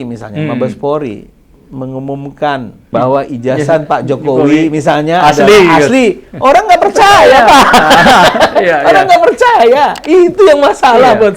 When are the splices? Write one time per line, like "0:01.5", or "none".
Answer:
0:02.8